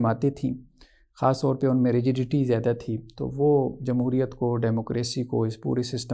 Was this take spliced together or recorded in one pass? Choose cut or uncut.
uncut